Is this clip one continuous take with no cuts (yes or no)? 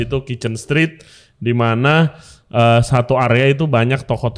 yes